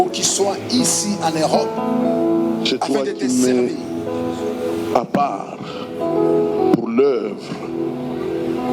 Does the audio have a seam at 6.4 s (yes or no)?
no